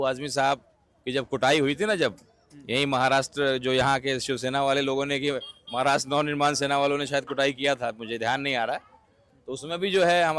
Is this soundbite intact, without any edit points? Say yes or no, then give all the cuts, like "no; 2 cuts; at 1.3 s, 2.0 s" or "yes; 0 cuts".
yes; 0 cuts